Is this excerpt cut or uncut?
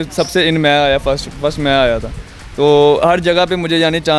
uncut